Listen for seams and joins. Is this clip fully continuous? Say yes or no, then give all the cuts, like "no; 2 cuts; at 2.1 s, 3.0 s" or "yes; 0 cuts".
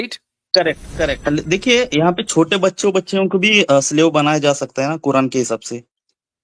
no; 1 cut; at 1.2 s